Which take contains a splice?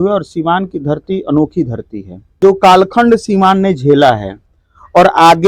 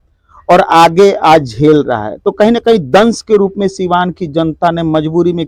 first; 1 cut; at 2.3 s

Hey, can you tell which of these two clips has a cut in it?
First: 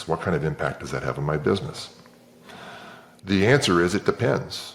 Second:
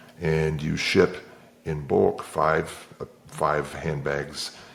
first; 1 cut; at 3.1 s

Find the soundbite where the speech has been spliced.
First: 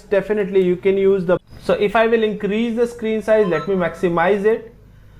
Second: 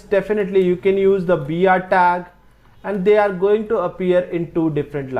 first; 1 cut; at 1.5 s

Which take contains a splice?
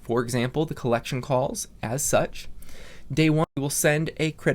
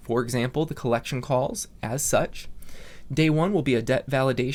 first; 1 cut; at 3.5 s

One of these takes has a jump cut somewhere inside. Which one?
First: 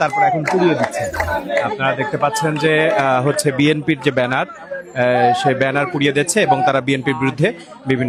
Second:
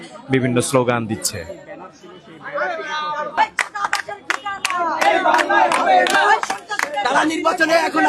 second; 2 cuts; at 3.4 s, 7.0 s

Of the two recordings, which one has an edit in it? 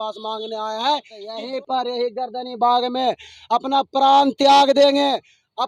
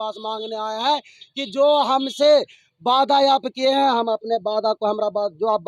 first; 1 cut; at 1.4 s

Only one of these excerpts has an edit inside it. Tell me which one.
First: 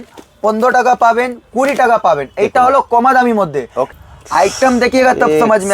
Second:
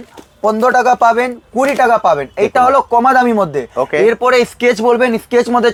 first; 1 cut; at 3.9 s

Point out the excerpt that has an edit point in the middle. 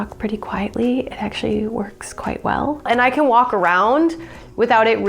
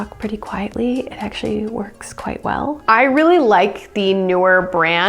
first; 1 cut; at 2.9 s

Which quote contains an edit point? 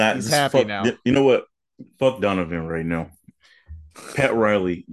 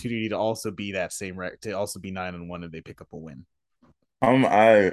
second; 1 cut; at 4.0 s

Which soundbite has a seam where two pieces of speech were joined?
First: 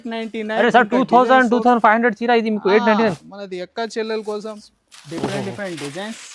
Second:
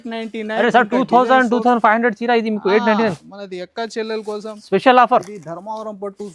first; 1 cut; at 4.6 s

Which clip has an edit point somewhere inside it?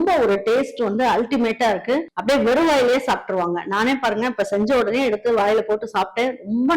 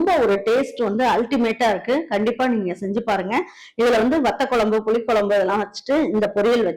first; 1 cut; at 2.1 s

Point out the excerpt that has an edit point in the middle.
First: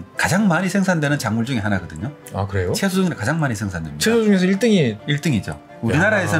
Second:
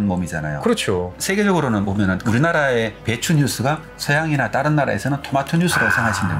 second; 3 cuts; at 1.2 s, 2.2 s, 3.9 s

